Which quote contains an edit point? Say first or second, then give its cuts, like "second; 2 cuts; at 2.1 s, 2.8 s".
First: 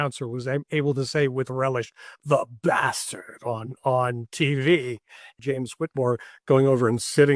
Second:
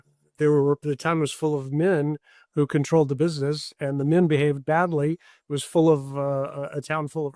first; 1 cut; at 5.4 s